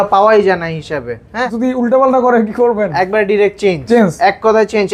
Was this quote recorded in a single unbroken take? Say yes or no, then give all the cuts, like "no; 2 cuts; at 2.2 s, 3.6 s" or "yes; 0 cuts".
no; 1 cut; at 1.4 s